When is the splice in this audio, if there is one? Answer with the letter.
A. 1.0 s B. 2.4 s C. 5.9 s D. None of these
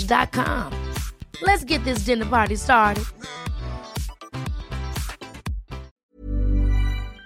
C